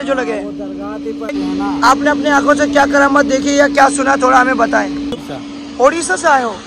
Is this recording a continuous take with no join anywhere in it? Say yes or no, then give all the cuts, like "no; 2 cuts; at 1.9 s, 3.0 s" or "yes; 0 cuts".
no; 2 cuts; at 1.3 s, 5.1 s